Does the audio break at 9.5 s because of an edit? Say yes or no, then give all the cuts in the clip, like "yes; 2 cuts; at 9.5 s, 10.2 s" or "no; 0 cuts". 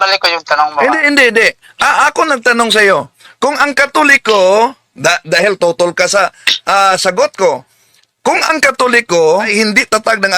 yes; 1 cut; at 9.5 s